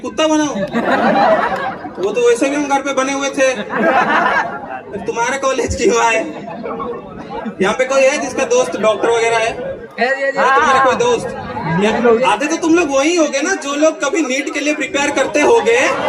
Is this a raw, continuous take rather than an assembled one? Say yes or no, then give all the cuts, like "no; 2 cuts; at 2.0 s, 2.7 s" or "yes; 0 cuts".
yes; 0 cuts